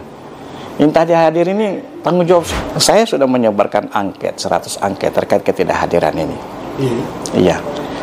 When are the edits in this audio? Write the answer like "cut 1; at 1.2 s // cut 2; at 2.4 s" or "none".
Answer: cut 1; at 2.5 s